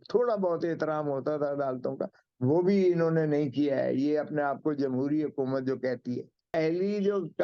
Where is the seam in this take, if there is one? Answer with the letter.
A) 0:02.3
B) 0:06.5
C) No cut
B